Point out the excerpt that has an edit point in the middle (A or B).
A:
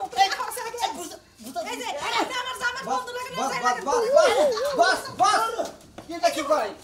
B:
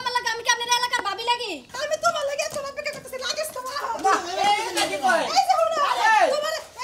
B